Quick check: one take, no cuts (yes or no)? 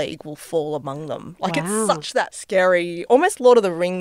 no